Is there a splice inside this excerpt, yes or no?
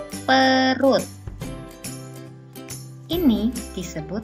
no